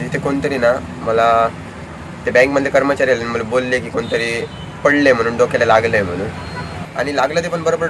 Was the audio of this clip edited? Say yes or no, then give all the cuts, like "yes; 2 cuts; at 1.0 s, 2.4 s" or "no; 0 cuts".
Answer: yes; 1 cut; at 6.8 s